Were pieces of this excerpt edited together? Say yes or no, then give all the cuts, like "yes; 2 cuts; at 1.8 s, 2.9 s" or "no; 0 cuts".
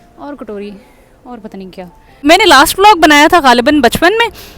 yes; 1 cut; at 2.2 s